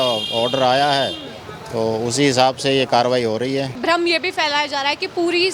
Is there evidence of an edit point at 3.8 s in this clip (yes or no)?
yes